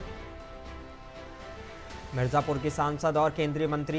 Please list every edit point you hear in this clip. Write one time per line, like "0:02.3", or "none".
0:01.6